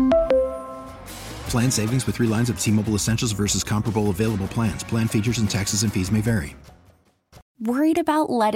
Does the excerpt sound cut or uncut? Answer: cut